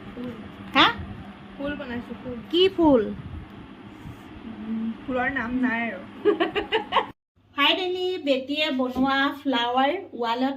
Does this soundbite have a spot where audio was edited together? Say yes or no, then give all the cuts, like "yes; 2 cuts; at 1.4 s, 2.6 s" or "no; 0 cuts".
yes; 1 cut; at 7.1 s